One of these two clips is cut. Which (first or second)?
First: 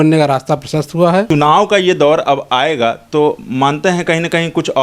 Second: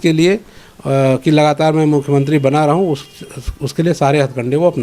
first